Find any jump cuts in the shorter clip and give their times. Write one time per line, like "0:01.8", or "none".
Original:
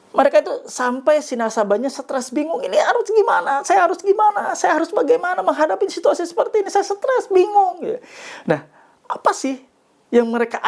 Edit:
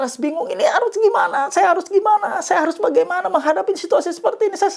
none